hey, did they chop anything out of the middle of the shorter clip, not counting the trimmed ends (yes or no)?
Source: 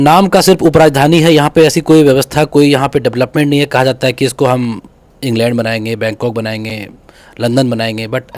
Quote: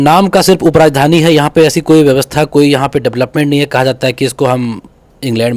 no